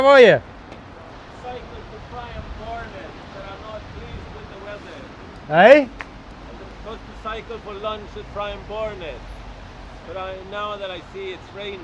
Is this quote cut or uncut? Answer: cut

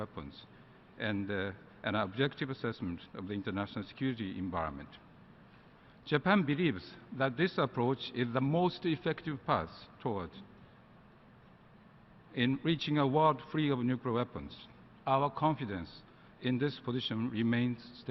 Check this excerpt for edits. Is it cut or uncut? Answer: uncut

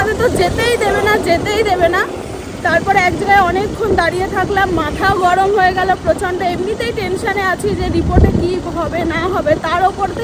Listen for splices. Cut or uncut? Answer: uncut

